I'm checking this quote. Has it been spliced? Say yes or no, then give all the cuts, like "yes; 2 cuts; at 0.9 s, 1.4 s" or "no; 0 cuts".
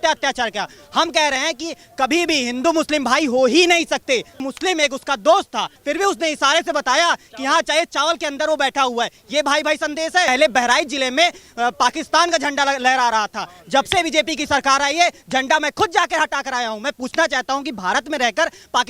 yes; 3 cuts; at 4.4 s, 5.7 s, 10.3 s